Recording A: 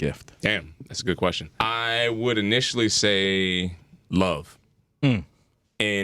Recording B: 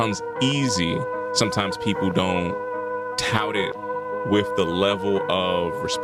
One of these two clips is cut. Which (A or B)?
A